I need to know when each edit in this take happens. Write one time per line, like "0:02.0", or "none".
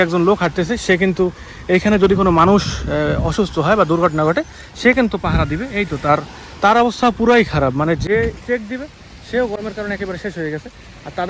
none